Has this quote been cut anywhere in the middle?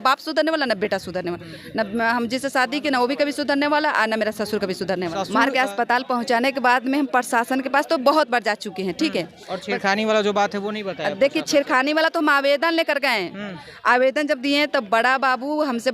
yes; 1 cut; at 5.3 s

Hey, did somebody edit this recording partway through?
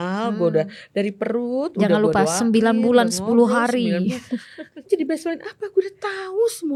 no; 0 cuts

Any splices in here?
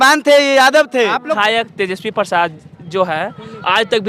yes; 1 cut; at 1.3 s

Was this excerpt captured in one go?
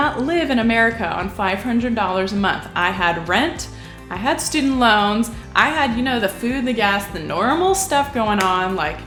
yes; 0 cuts

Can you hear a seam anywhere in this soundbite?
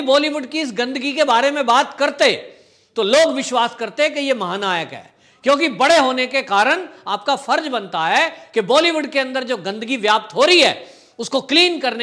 no; 0 cuts

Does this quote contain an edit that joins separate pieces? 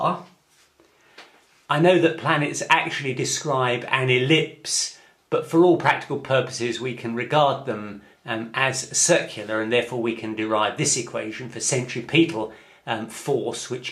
yes; 1 cut; at 2.2 s

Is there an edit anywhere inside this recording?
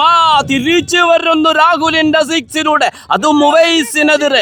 no; 0 cuts

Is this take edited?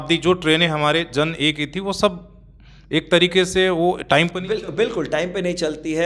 no; 0 cuts

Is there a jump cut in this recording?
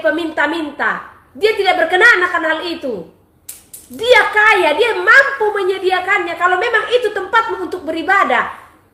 no; 0 cuts

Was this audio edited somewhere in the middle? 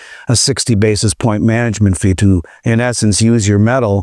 no; 0 cuts

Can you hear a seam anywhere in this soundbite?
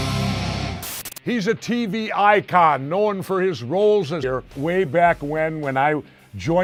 no; 0 cuts

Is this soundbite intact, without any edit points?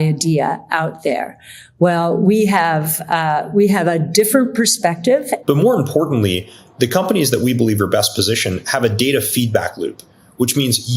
no; 1 cut; at 5.3 s

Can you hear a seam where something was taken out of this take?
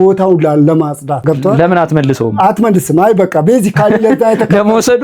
yes; 1 cut; at 1.2 s

